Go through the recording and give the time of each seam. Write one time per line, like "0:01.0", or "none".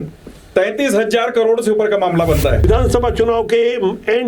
0:02.6